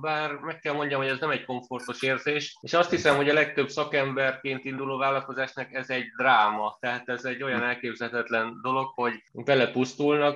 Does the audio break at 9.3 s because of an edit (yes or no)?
yes